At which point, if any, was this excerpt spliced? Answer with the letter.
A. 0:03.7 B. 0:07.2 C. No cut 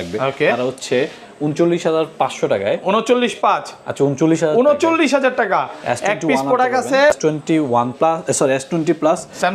B